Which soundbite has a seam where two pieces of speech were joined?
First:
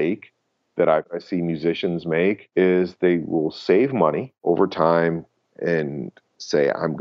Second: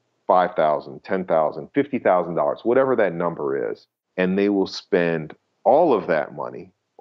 first; 3 cuts; at 1.1 s, 2.4 s, 4.3 s

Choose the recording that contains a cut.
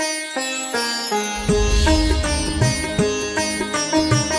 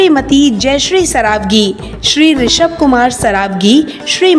first; 1 cut; at 2.7 s

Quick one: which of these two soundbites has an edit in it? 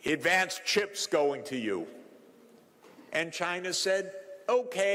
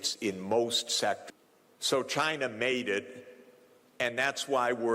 second; 1 cut; at 1.2 s

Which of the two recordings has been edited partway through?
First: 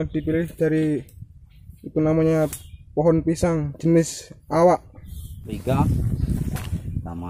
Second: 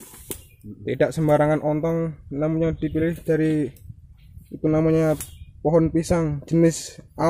first; 1 cut; at 5.5 s

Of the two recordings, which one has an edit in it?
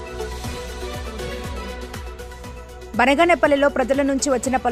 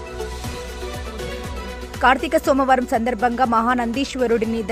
second; 1 cut; at 1.6 s

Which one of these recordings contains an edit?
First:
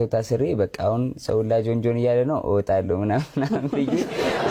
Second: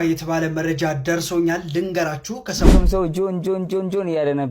second; 1 cut; at 2.7 s

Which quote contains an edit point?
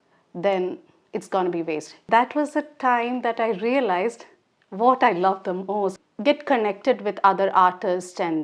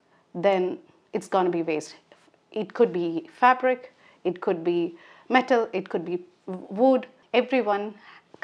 first; 2 cuts; at 2.0 s, 6.0 s

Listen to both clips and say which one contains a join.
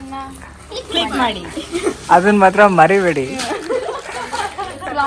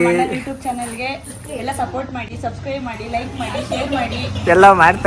second; 1 cut; at 2.2 s

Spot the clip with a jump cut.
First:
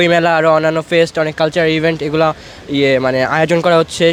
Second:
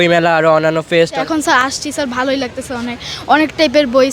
second; 1 cut; at 1.2 s

